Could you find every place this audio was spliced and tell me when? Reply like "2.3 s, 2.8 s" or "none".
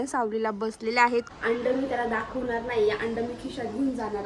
1.3 s